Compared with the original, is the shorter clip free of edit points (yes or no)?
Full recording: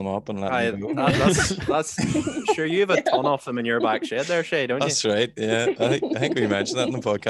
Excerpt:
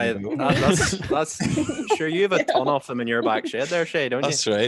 yes